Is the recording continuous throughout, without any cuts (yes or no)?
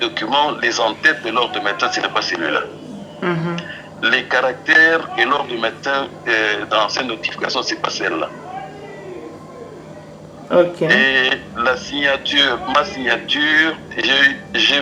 yes